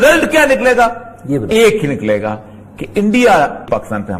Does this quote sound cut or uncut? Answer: uncut